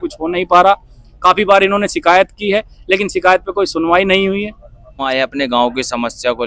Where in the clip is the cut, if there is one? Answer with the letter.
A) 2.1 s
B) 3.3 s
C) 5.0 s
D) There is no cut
C